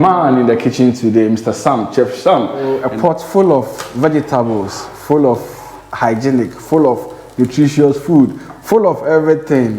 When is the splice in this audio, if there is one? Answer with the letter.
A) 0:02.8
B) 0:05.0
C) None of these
A